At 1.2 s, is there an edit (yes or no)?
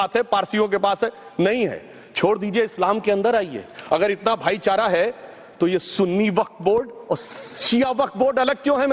yes